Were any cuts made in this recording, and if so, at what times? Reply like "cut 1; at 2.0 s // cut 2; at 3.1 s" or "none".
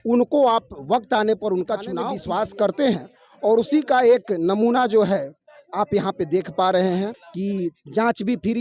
cut 1; at 2.0 s